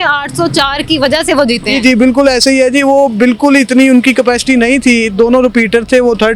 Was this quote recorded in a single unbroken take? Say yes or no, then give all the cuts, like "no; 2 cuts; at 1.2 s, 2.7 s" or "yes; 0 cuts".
yes; 0 cuts